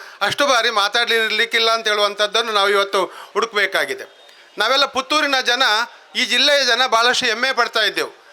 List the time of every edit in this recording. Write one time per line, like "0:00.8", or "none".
none